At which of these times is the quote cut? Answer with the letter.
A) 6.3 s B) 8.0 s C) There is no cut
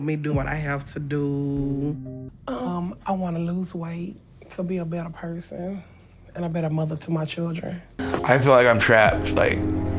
B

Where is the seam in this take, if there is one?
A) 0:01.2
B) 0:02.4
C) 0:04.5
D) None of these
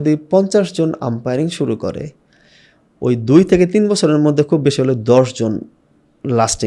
D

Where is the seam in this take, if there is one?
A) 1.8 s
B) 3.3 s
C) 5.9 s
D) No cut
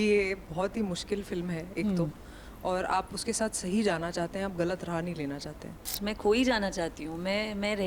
C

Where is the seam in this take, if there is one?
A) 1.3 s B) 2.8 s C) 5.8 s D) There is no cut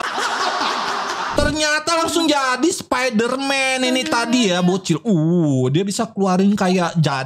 A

